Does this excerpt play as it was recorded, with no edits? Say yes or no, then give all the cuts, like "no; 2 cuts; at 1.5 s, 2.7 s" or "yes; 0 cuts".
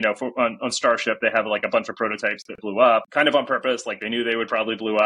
no; 1 cut; at 3.0 s